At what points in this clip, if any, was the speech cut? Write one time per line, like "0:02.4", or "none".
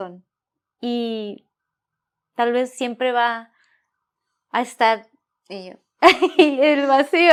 none